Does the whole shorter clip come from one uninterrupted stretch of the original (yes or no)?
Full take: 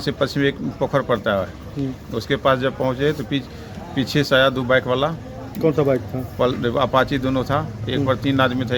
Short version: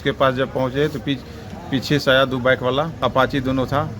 no